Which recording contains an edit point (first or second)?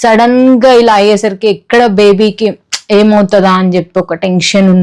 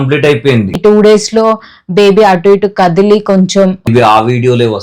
second